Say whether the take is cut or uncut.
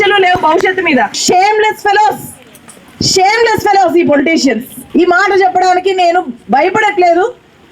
cut